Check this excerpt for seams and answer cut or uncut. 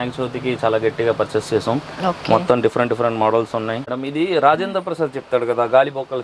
cut